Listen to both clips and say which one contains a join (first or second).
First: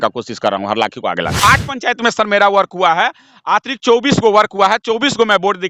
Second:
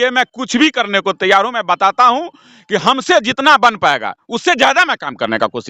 first